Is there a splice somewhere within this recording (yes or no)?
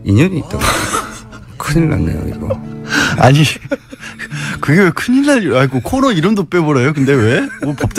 no